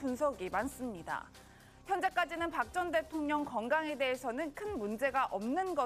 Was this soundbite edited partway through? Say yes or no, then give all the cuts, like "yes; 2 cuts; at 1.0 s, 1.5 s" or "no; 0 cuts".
no; 0 cuts